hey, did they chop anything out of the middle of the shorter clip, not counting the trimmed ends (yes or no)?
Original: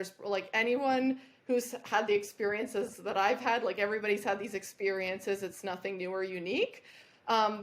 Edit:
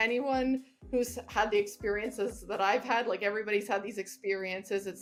no